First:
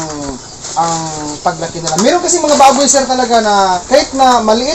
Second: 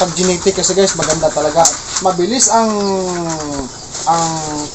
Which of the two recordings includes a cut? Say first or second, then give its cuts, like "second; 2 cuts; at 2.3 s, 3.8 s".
first; 1 cut; at 3.8 s